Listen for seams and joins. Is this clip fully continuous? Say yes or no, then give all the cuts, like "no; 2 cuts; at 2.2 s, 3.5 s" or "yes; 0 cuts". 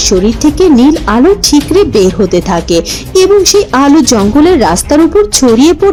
yes; 0 cuts